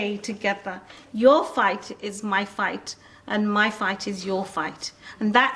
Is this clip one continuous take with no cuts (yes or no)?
yes